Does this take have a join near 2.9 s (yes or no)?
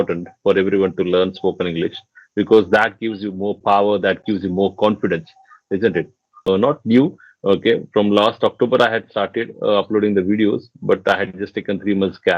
no